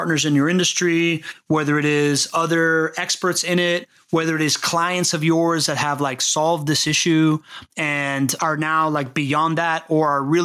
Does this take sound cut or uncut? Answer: cut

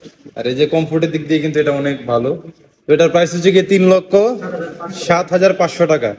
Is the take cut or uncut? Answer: uncut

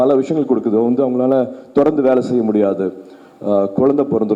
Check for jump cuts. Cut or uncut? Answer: uncut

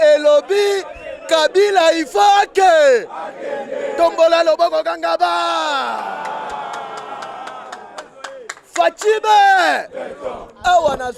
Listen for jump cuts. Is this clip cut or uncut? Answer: uncut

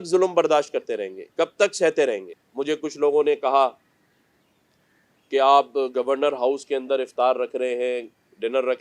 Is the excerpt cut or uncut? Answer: cut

